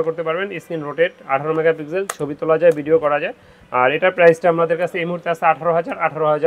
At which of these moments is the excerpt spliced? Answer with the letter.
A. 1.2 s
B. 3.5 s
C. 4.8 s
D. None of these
D